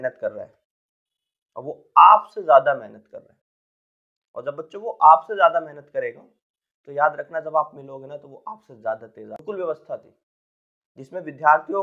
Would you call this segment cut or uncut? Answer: cut